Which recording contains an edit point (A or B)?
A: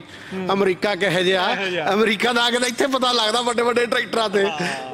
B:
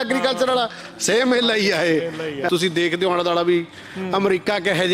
B